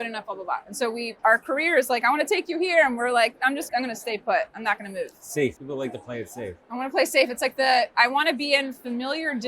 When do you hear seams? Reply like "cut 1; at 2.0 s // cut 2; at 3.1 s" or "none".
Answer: cut 1; at 1.1 s // cut 2; at 3.6 s // cut 3; at 5.6 s

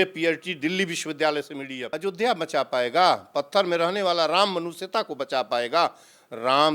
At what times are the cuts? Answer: cut 1; at 1.8 s

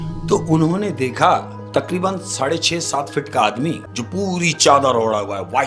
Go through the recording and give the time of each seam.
cut 1; at 3.9 s

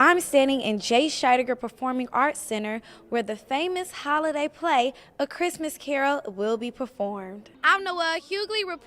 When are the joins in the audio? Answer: cut 1; at 7.6 s

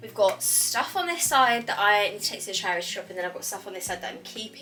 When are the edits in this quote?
none

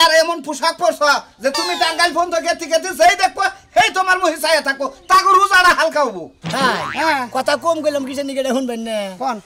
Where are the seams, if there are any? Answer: cut 1; at 6.3 s

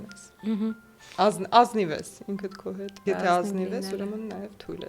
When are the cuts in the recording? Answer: cut 1; at 3.0 s

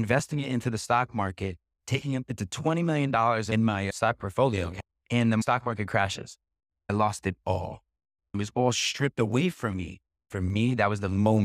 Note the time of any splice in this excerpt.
cut 1; at 3.5 s // cut 2; at 5.4 s // cut 3; at 6.9 s // cut 4; at 8.4 s // cut 5; at 10.2 s

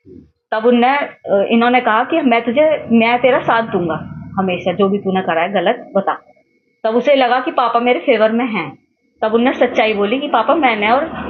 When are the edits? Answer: none

